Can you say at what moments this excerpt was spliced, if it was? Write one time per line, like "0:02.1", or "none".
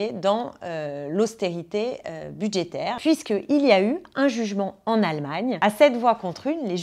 0:03.0
0:05.6